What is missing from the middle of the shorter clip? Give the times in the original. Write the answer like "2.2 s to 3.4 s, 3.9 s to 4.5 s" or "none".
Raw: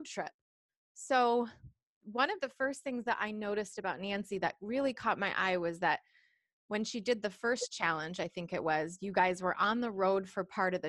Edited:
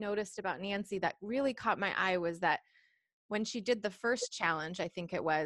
none

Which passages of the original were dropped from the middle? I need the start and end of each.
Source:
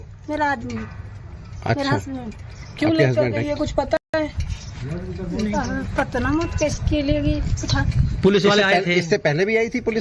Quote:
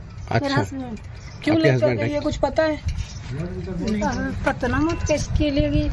4.0 s to 4.1 s

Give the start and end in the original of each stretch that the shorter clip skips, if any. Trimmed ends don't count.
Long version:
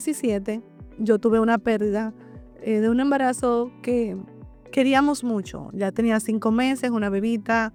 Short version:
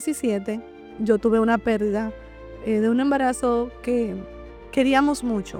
none

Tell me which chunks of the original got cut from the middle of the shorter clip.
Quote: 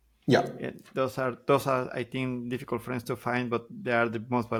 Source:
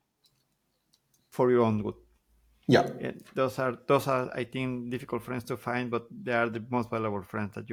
none

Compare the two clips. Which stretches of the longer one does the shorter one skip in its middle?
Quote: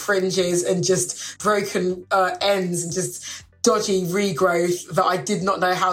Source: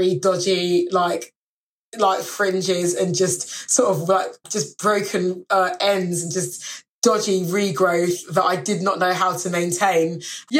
3.5 s to 4.6 s

